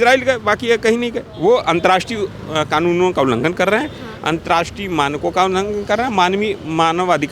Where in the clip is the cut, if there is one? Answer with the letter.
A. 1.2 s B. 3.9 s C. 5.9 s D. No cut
A